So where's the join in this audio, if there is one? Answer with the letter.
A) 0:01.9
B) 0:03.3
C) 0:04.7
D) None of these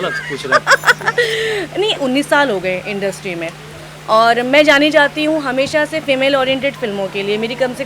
A